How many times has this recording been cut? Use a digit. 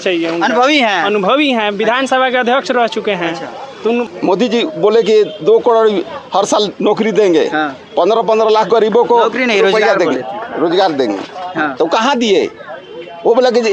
1